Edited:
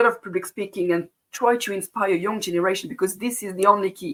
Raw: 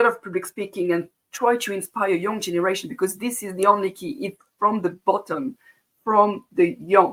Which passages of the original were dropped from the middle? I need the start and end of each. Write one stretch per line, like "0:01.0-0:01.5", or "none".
none